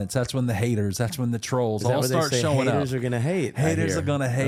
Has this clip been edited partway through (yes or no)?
no